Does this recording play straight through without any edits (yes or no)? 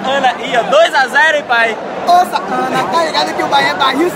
yes